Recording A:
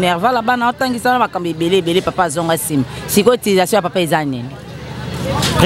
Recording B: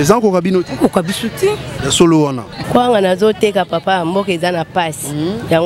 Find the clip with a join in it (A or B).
B